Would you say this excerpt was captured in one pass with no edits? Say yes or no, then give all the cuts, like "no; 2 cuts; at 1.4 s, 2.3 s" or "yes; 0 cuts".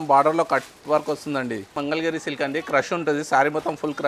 no; 1 cut; at 1.7 s